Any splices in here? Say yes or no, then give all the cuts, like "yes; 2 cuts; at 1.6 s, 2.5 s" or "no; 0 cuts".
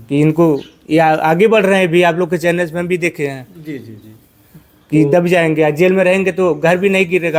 no; 0 cuts